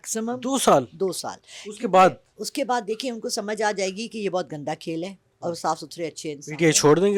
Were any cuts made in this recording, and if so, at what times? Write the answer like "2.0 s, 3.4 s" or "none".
none